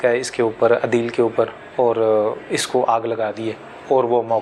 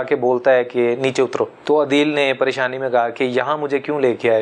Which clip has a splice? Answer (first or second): second